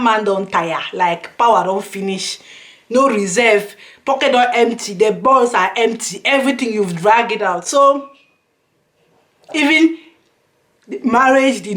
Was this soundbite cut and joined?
no; 0 cuts

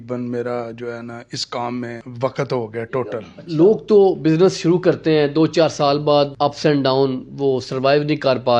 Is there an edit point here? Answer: yes; 2 cuts; at 2.0 s, 3.3 s

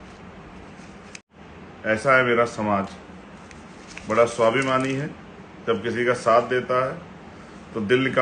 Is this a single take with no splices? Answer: no; 1 cut; at 1.3 s

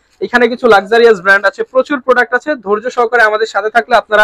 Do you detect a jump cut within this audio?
no; 0 cuts

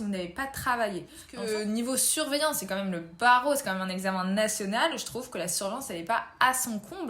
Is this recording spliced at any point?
yes; 1 cut; at 1.3 s

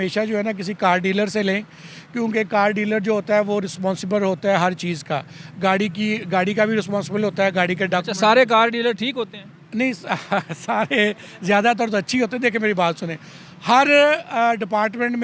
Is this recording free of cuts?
yes; 0 cuts

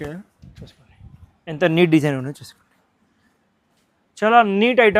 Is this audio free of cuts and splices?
yes; 0 cuts

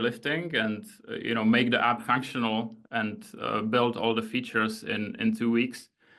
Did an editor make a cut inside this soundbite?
no; 0 cuts

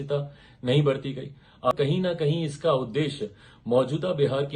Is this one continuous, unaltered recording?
no; 1 cut; at 1.7 s

